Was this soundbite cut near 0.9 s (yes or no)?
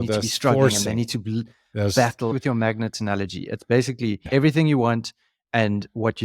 no